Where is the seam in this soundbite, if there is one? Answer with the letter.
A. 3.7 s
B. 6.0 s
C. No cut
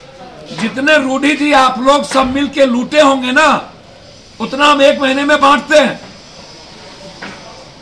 C